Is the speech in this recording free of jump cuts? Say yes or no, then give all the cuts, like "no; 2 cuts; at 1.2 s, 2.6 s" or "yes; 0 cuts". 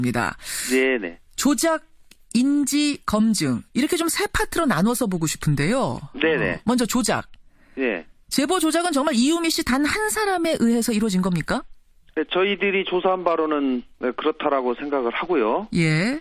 no; 1 cut; at 15.2 s